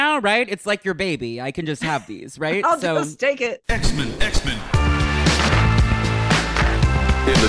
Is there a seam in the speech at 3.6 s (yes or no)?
yes